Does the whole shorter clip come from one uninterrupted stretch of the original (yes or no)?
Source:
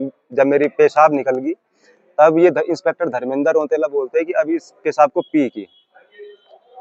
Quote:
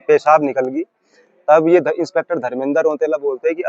yes